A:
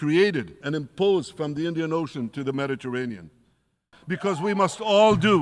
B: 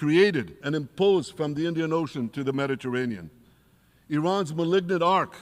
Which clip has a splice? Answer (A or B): A